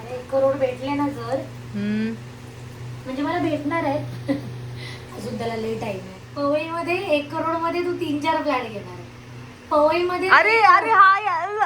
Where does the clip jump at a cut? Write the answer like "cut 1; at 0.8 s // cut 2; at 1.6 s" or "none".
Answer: cut 1; at 6.2 s